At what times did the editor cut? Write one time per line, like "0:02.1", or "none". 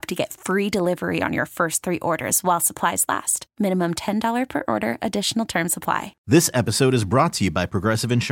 0:06.1